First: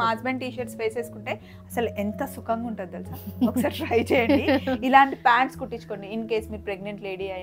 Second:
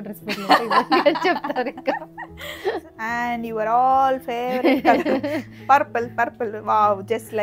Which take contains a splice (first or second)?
second